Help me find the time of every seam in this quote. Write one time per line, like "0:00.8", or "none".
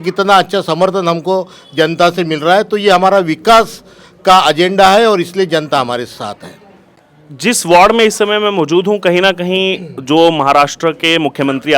none